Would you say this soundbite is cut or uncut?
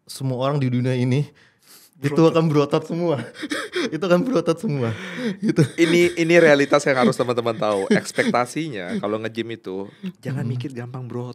uncut